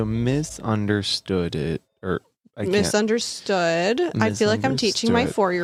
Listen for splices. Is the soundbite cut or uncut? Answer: uncut